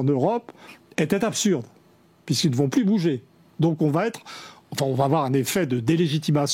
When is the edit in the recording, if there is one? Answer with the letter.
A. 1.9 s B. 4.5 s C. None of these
C